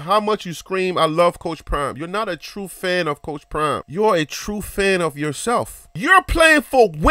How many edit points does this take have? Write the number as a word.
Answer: one